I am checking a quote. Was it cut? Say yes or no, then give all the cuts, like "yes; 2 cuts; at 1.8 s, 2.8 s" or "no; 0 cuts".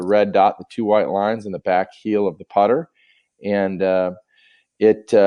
no; 0 cuts